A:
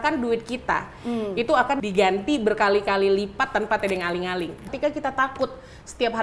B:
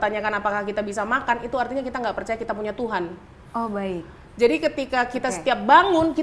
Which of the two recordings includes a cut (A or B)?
A